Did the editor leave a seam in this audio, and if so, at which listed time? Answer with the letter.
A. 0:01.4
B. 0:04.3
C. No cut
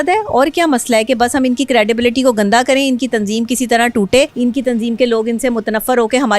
B